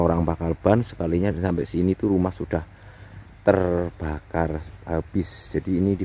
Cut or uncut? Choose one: uncut